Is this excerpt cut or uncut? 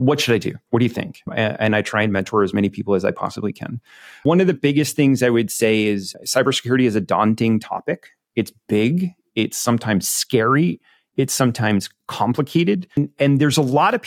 cut